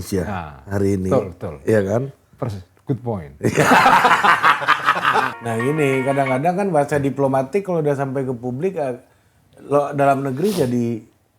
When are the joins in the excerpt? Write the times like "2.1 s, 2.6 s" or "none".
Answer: 5.3 s